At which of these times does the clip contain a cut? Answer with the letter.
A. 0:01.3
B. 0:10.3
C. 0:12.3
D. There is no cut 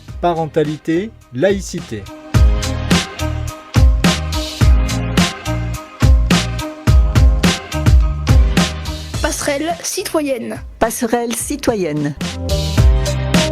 C